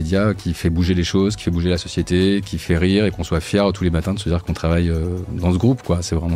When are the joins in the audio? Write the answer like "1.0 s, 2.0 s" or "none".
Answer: none